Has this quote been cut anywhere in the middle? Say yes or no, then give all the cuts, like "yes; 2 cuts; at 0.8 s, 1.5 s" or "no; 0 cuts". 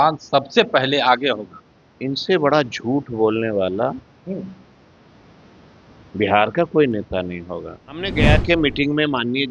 yes; 1 cut; at 8.2 s